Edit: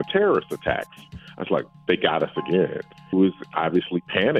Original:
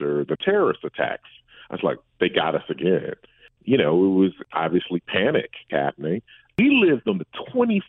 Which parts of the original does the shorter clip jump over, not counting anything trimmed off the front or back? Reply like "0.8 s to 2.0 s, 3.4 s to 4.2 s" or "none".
3.5 s to 4.1 s